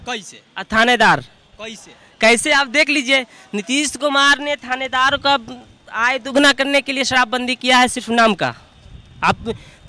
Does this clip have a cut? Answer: no; 0 cuts

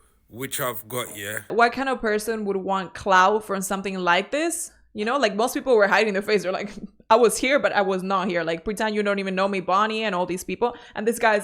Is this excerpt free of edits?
no; 1 cut; at 1.5 s

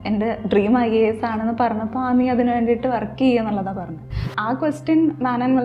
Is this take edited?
yes; 1 cut; at 4.2 s

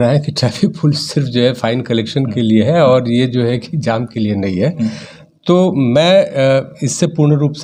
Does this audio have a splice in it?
no; 0 cuts

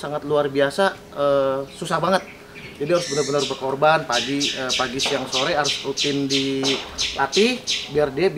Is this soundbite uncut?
yes; 0 cuts

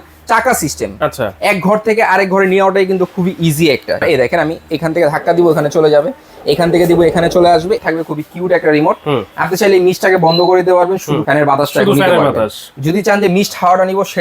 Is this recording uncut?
no; 3 cuts; at 4.0 s, 7.8 s, 11.2 s

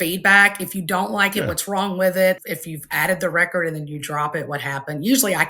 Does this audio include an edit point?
yes; 1 cut; at 2.4 s

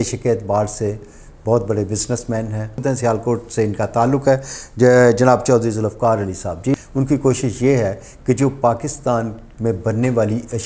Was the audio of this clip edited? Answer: yes; 2 cuts; at 2.8 s, 6.7 s

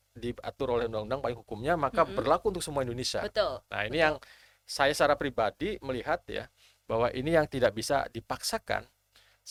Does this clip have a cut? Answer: no; 0 cuts

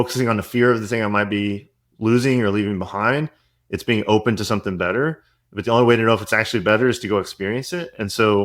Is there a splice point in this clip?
no; 0 cuts

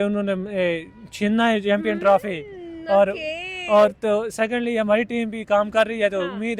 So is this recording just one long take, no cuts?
yes; 0 cuts

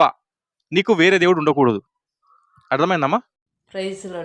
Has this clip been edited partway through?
no; 0 cuts

